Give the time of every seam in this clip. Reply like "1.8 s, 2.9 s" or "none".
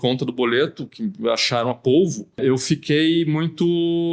2.3 s

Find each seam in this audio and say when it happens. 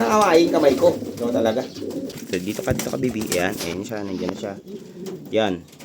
2.1 s

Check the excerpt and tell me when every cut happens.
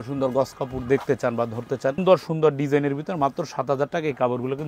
2.0 s

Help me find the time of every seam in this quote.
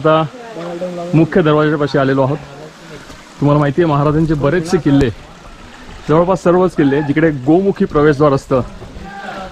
none

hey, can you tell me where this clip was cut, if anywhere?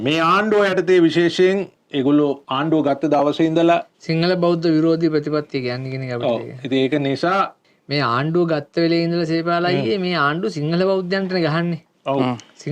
1.8 s, 2.5 s, 7.6 s

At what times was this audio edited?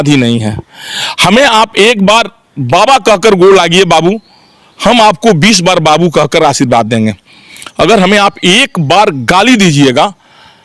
none

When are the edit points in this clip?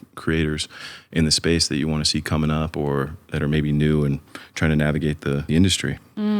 5.4 s

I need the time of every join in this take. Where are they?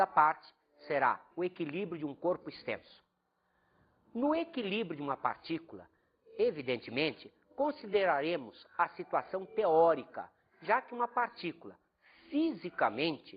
4.4 s

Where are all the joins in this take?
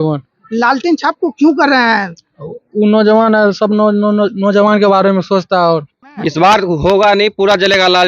6.2 s

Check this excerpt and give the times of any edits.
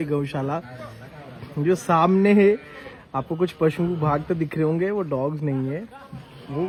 none

